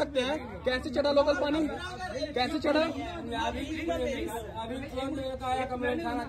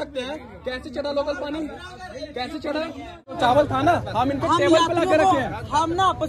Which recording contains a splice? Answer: second; 1 cut; at 3.4 s

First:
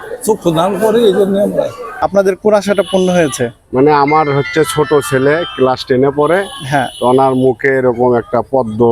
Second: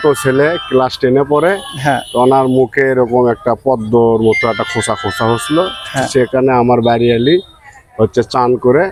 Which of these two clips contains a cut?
first; 1 cut; at 1.9 s

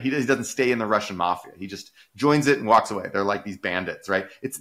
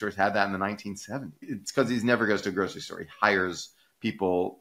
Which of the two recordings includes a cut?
second; 1 cut; at 1.5 s

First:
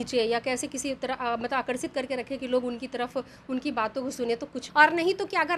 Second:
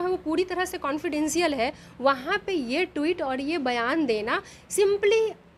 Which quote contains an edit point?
first; 1 cut; at 4.6 s

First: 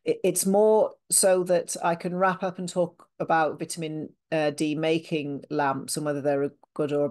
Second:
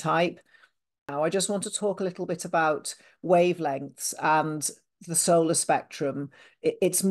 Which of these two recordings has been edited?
second; 1 cut; at 1.1 s

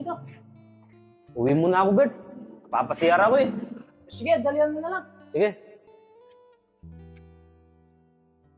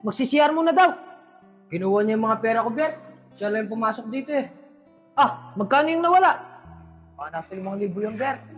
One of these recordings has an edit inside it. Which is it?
first; 1 cut; at 5.8 s

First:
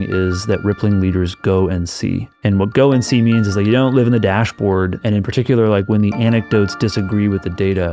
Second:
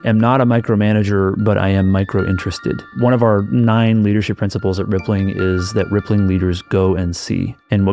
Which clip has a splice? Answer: second; 1 cut; at 2.9 s

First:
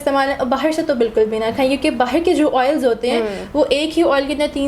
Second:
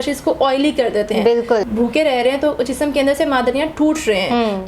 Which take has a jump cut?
second; 1 cut; at 1.7 s

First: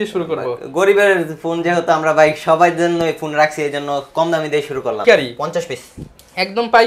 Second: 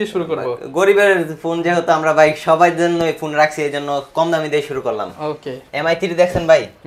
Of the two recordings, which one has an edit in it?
first; 1 cut; at 5.0 s

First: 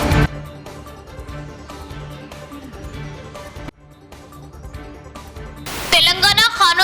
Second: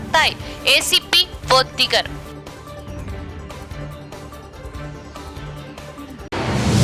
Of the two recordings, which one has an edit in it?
first; 1 cut; at 4.6 s

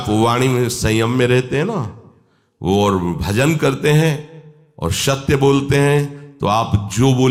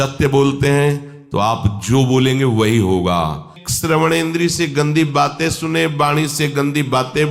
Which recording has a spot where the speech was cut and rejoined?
second; 1 cut; at 3.6 s

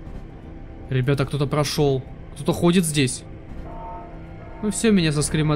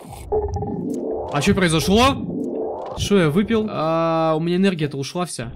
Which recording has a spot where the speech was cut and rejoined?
second; 1 cut; at 3.7 s

